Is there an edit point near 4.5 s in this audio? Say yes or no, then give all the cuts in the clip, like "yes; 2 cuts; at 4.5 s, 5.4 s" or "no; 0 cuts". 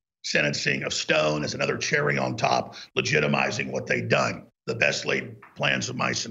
yes; 1 cut; at 4.5 s